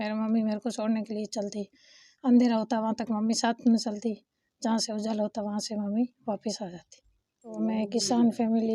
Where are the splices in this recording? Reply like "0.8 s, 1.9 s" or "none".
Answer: 7.5 s